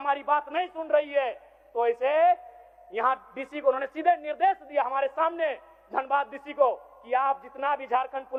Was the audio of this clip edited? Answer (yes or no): no